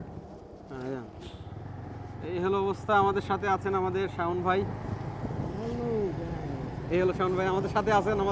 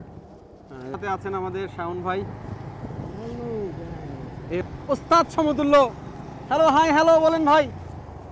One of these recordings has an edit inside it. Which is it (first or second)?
second